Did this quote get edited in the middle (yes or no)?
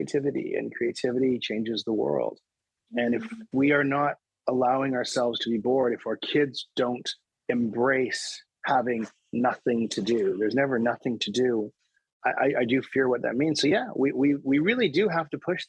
no